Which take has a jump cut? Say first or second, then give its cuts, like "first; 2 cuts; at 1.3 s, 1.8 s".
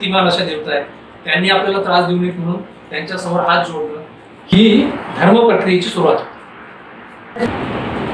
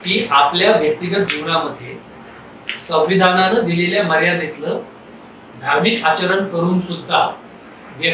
first; 1 cut; at 7.2 s